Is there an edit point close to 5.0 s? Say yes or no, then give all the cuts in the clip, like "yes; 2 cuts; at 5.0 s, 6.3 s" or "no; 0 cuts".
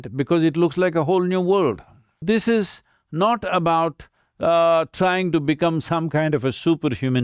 no; 1 cut; at 2.2 s